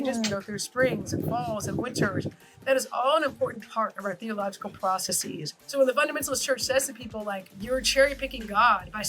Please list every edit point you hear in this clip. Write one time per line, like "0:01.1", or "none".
0:05.5
0:07.5